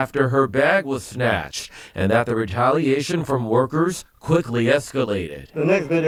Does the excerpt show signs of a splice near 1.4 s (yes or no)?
no